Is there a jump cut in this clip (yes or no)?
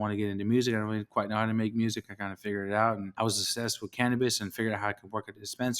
yes